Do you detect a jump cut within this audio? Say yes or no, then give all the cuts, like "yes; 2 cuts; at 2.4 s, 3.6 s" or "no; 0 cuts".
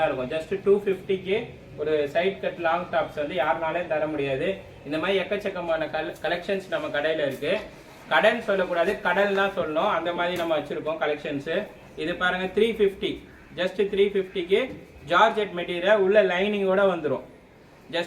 no; 0 cuts